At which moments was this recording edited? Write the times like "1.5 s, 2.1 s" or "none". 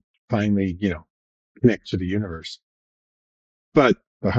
none